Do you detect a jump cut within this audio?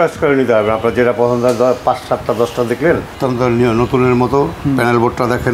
yes; 1 cut; at 3.1 s

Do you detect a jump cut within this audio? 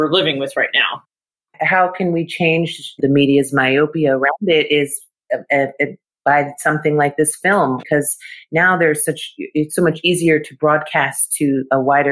yes; 3 cuts; at 1.3 s, 3.0 s, 7.8 s

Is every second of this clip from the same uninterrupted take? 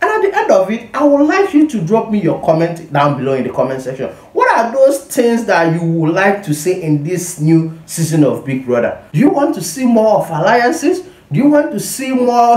no; 1 cut; at 9.0 s

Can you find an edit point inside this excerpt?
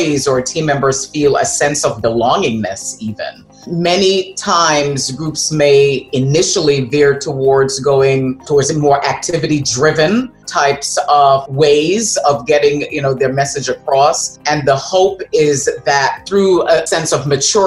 yes; 3 cuts; at 3.7 s, 14.4 s, 16.8 s

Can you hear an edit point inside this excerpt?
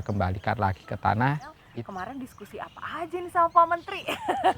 yes; 1 cut; at 1.6 s

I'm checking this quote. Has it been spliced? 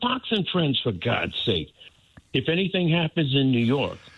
yes; 1 cut; at 1.8 s

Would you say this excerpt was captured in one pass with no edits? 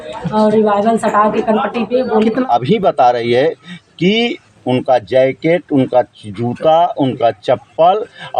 no; 1 cut; at 2.4 s

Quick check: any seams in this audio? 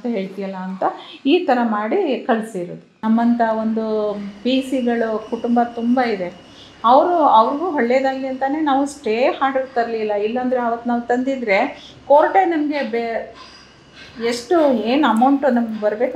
yes; 1 cut; at 2.8 s

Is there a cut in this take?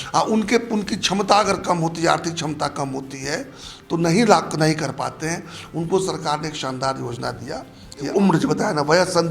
yes; 1 cut; at 8.1 s

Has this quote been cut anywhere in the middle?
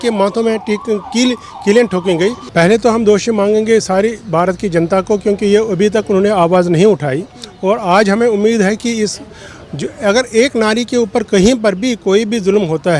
yes; 1 cut; at 2.4 s

